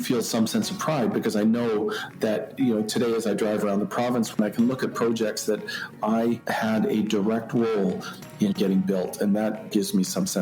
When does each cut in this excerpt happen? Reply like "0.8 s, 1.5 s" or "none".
none